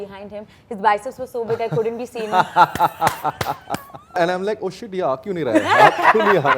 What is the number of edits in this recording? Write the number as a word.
one